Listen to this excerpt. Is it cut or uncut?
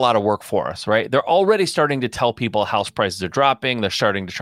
uncut